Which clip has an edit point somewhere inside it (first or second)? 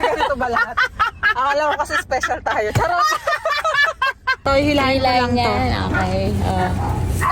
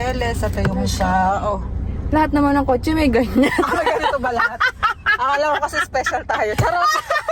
first